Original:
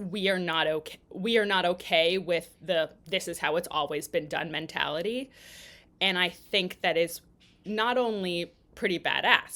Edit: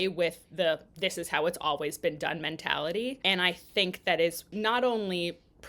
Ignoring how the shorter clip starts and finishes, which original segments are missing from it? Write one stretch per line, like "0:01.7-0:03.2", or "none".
0:05.3-0:06.0
0:07.2-0:07.6